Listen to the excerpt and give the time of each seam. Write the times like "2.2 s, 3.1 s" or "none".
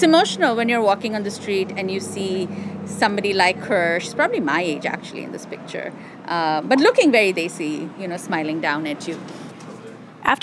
none